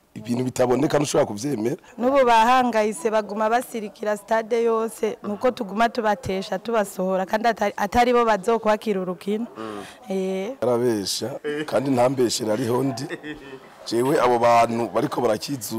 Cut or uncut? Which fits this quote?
cut